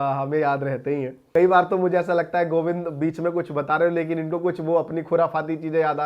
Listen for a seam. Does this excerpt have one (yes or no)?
yes